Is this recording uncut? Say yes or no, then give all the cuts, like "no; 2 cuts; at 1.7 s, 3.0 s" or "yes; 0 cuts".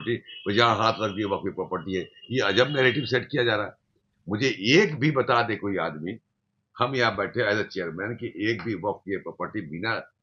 yes; 0 cuts